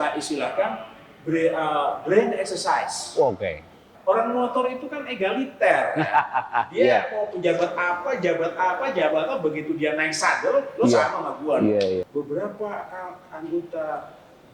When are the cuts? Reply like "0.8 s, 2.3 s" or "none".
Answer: 3.9 s, 12.0 s